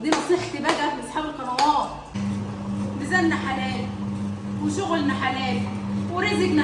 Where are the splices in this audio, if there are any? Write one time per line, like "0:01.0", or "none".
0:02.1